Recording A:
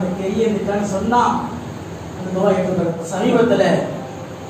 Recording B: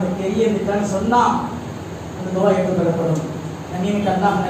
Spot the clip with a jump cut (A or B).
A